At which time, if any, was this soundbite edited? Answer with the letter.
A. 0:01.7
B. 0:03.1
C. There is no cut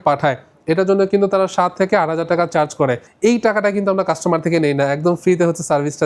B